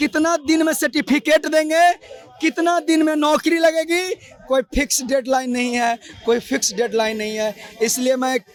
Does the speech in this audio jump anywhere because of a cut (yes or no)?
no